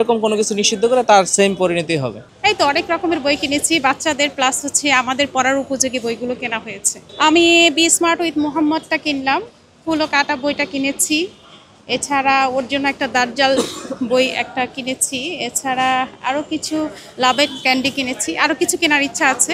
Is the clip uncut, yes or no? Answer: yes